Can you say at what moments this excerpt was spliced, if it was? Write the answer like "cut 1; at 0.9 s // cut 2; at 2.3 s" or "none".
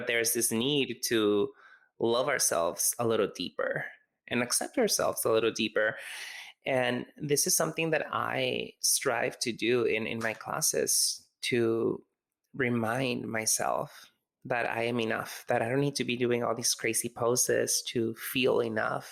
none